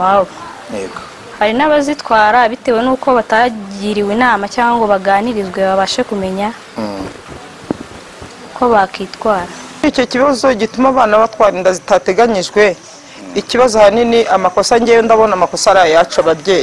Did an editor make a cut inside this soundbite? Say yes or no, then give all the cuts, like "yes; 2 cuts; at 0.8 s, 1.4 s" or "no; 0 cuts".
yes; 1 cut; at 9.8 s